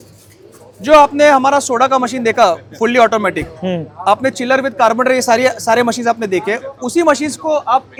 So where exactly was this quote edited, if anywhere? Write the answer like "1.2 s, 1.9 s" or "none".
none